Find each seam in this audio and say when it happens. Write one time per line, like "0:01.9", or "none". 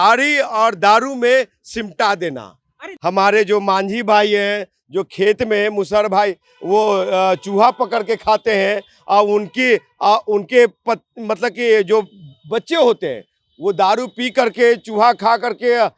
0:02.8